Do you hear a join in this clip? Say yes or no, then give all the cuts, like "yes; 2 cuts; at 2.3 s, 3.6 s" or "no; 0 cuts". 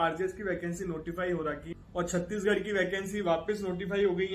yes; 1 cut; at 1.7 s